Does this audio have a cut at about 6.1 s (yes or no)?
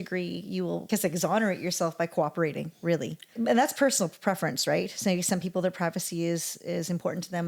no